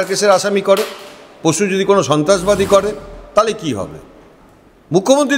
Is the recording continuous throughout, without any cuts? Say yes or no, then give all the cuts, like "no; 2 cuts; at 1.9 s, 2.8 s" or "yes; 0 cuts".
yes; 0 cuts